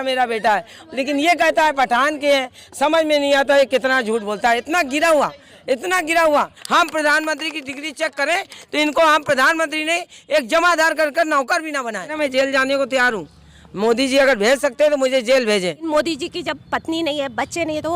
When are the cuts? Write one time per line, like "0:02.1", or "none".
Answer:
0:06.6
0:12.1
0:15.9